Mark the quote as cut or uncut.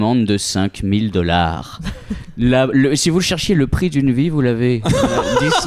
uncut